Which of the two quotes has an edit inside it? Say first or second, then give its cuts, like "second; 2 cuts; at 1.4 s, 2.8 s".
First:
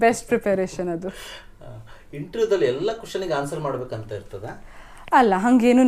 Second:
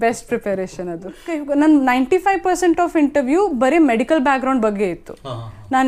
second; 1 cut; at 1.3 s